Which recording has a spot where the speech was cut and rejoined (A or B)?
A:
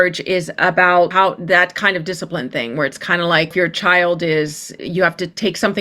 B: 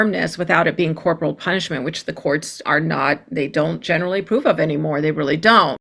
A